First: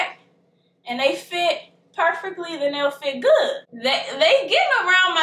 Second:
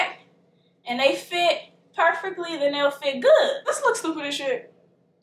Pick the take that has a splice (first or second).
second